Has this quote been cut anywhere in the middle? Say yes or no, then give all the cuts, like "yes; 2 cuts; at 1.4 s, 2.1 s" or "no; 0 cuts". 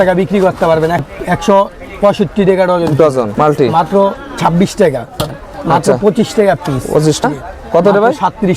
yes; 4 cuts; at 1.0 s, 3.3 s, 5.4 s, 7.2 s